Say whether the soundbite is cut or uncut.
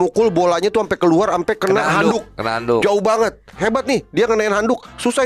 cut